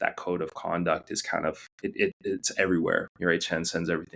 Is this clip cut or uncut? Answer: uncut